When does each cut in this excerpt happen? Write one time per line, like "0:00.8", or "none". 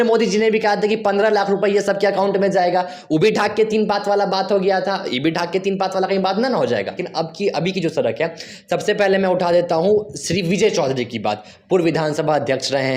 0:07.0